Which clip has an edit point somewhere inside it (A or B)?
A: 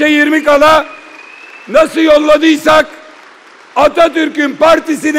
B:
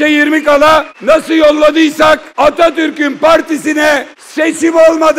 B